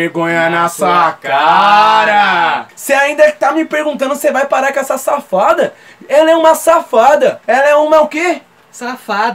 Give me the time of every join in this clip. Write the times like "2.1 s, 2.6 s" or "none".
2.7 s